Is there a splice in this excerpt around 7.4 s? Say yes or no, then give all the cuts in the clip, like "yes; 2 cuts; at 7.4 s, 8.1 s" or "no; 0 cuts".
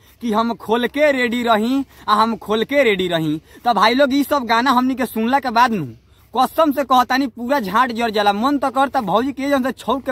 no; 0 cuts